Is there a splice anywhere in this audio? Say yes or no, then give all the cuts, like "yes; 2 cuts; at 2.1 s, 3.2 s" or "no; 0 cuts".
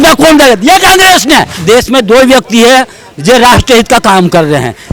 yes; 1 cut; at 1.5 s